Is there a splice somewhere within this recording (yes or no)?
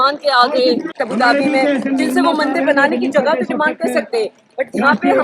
yes